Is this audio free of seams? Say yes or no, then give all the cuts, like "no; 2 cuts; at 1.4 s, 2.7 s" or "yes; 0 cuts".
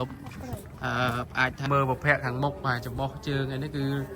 no; 1 cut; at 1.7 s